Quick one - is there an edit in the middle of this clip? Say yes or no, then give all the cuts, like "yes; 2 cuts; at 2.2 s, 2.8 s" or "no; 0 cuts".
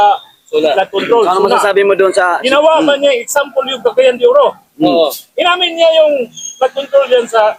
no; 0 cuts